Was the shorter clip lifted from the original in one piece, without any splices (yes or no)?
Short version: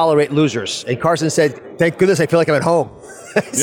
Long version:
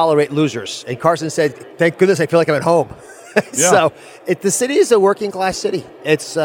yes